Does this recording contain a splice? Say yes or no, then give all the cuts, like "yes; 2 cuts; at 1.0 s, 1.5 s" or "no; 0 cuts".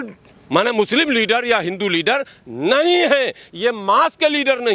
no; 0 cuts